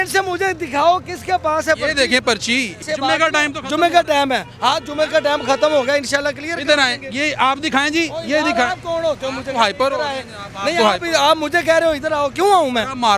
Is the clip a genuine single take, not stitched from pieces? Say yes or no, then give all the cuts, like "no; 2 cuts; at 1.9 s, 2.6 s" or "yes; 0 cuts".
yes; 0 cuts